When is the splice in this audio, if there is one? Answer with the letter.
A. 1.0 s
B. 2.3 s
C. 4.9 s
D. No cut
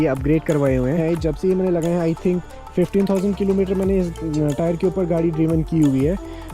A